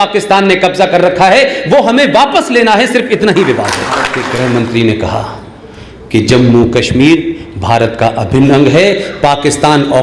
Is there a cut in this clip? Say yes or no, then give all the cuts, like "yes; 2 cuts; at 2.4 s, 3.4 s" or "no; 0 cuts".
yes; 1 cut; at 4.2 s